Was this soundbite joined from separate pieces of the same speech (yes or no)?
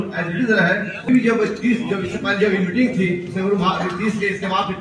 yes